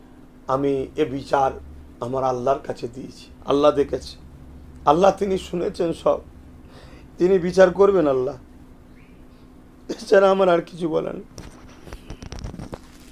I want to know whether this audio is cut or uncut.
uncut